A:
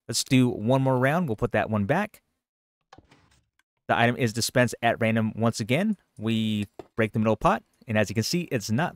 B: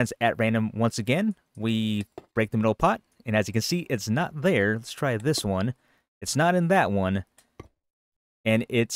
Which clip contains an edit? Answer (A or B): A